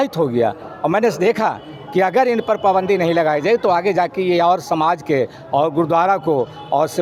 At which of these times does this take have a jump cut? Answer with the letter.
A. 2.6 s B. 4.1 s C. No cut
C